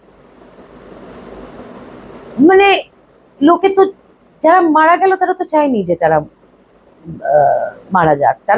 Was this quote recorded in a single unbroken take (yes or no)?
yes